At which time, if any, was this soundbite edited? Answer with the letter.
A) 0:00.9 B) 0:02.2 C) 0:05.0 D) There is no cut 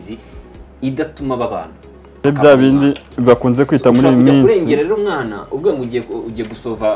B